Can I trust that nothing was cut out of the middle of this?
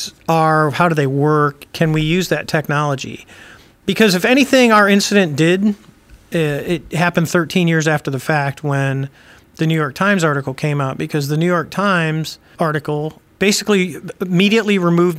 no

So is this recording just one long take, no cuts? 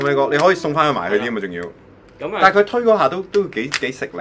yes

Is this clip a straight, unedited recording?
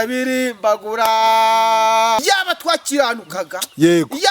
no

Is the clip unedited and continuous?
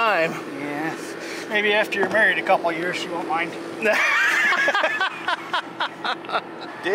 yes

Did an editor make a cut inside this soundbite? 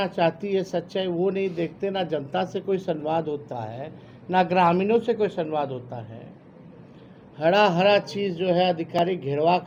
no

